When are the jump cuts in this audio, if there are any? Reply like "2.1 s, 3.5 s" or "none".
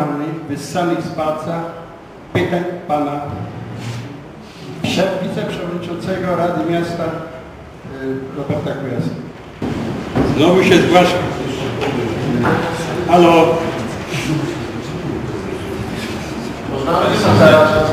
9.5 s